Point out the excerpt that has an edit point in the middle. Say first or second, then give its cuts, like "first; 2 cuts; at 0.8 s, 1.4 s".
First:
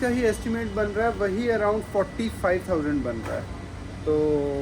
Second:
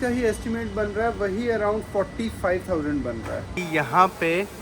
second; 1 cut; at 3.6 s